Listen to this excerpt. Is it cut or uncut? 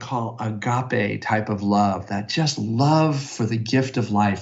uncut